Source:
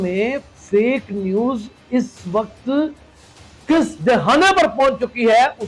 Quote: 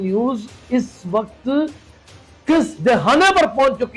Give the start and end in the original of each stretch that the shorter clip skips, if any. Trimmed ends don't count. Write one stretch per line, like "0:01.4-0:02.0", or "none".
none